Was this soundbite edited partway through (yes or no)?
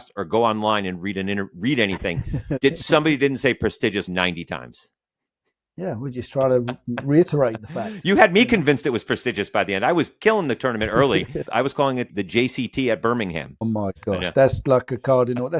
yes